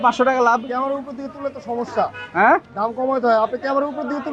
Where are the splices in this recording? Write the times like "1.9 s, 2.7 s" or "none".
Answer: none